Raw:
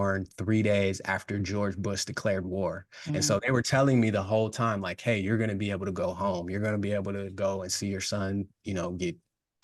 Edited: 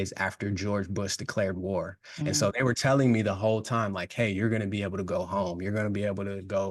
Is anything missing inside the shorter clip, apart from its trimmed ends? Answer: no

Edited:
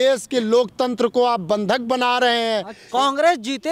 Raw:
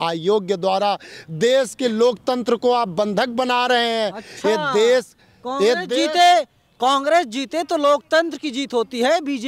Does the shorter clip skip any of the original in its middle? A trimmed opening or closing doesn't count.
yes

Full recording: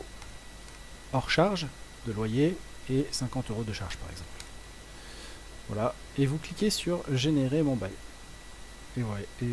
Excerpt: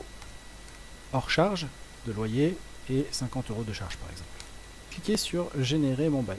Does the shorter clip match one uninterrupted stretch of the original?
no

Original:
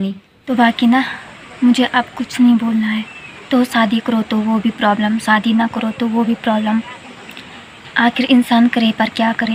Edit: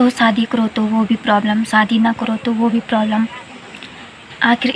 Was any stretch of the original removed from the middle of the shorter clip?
no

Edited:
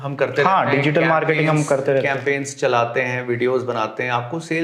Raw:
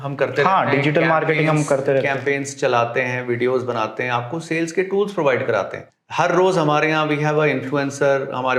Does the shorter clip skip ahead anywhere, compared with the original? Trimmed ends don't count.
no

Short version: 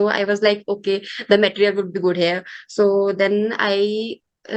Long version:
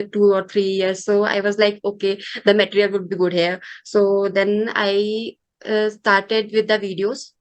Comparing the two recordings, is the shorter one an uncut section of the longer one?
yes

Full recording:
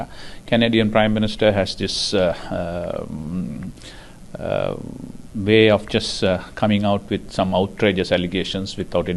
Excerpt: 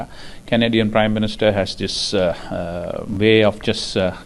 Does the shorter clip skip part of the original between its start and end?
yes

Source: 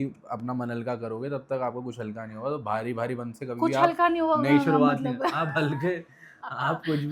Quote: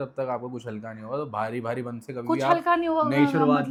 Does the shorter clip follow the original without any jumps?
yes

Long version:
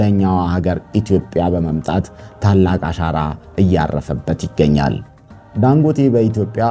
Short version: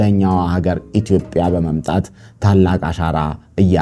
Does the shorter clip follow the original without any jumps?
yes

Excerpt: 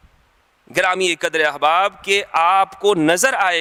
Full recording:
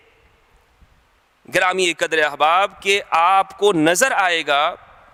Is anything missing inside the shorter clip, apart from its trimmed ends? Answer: no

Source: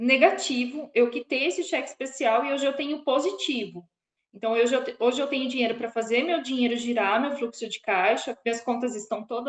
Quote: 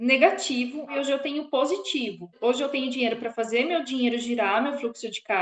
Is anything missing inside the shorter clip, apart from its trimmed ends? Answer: yes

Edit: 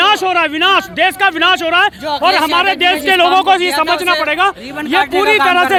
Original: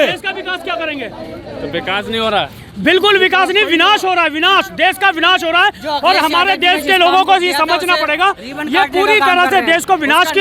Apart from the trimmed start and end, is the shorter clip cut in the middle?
no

